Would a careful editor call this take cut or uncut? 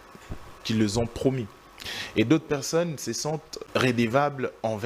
cut